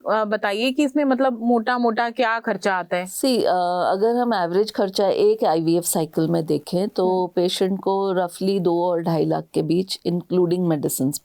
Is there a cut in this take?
no; 0 cuts

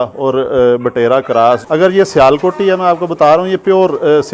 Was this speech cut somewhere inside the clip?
yes; 1 cut; at 1.6 s

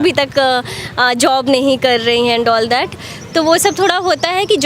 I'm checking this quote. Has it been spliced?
no; 0 cuts

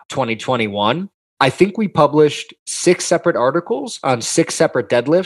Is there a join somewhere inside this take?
yes; 1 cut; at 1.2 s

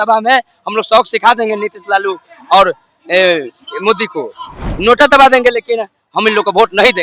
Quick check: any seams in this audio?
yes; 1 cut; at 4.6 s

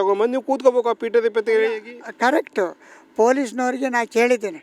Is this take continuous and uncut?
yes; 0 cuts

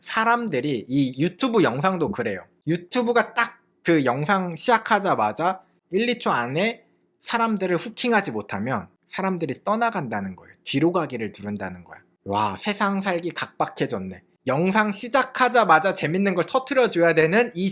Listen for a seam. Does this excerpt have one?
yes; 1 cut; at 5.7 s

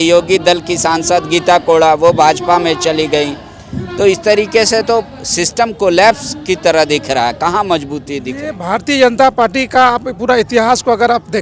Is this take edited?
no; 0 cuts

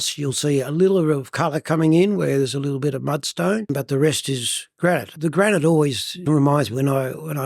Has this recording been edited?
yes; 3 cuts; at 3.7 s, 5.1 s, 6.2 s

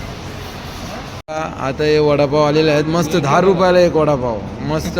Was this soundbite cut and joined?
yes; 1 cut; at 1.3 s

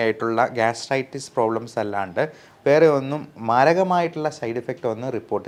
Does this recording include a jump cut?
no; 0 cuts

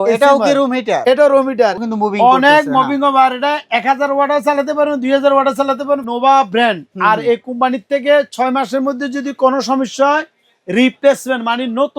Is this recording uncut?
no; 2 cuts; at 1.8 s, 6.0 s

